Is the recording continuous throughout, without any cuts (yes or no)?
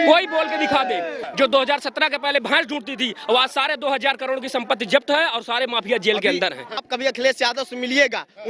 no